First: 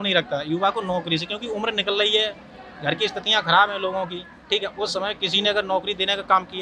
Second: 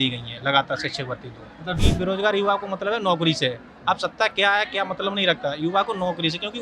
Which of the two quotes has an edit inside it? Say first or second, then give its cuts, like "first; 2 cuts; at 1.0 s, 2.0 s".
second; 1 cut; at 1.8 s